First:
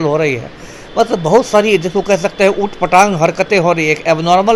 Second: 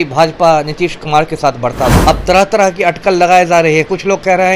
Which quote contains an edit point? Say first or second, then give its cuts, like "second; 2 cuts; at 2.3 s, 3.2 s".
second; 1 cut; at 2.0 s